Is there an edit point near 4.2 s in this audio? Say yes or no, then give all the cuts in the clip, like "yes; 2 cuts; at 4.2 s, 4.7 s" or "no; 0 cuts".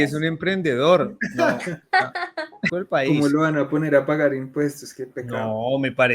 no; 1 cut; at 2.7 s